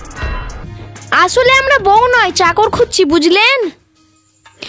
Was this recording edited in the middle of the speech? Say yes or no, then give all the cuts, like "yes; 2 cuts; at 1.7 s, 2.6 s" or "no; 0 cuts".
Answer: yes; 1 cut; at 0.9 s